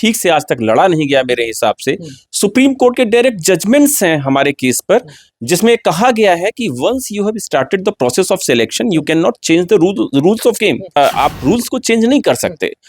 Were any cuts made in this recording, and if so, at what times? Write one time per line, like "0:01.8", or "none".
0:11.0

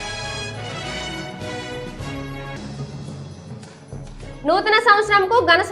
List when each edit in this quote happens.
0:01.2
0:02.2

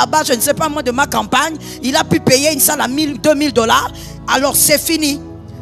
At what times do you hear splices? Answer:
none

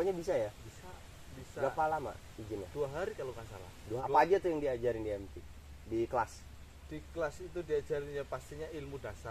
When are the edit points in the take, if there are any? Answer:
0:03.8

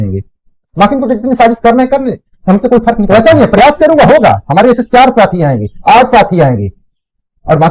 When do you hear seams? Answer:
0:03.1

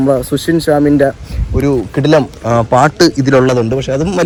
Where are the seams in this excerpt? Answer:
none

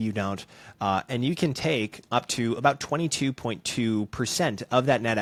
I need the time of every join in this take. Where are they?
none

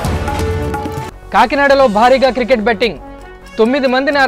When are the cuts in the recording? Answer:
none

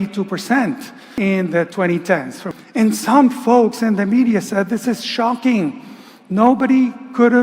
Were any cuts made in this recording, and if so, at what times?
0:01.1
0:02.5

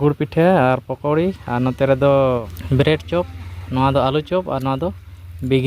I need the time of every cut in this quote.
0:02.5

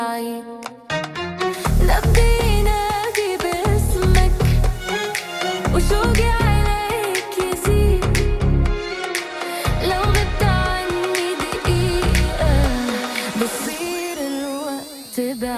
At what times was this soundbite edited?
none

